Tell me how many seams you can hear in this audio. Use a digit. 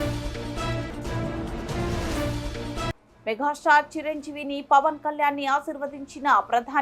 1